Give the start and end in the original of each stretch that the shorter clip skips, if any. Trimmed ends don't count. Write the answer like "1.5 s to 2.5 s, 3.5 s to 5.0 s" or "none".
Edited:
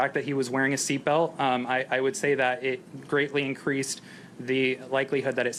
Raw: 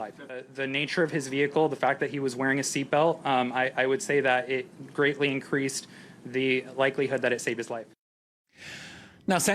none